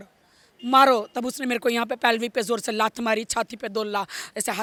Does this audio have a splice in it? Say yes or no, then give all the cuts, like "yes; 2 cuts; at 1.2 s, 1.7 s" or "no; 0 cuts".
no; 0 cuts